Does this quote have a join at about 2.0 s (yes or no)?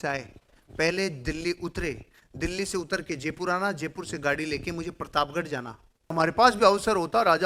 no